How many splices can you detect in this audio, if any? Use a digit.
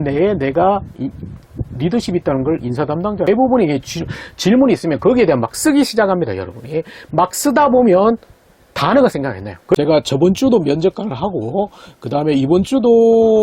2